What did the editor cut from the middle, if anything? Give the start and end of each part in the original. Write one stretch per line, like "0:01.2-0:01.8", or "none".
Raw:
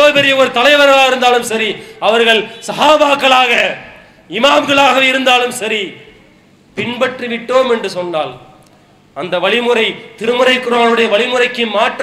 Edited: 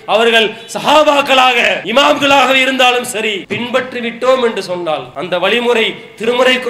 0:03.7-0:04.3
0:05.9-0:06.7
0:08.4-0:09.1